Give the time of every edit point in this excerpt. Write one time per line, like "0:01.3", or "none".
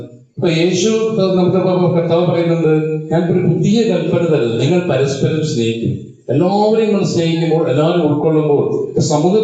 none